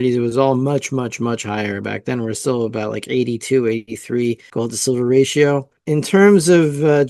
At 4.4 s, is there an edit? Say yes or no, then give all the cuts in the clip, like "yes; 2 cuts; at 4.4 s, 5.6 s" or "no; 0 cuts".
yes; 2 cuts; at 4.4 s, 5.7 s